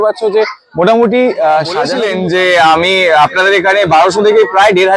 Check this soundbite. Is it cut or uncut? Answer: cut